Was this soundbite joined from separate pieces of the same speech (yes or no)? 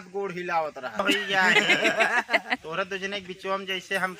yes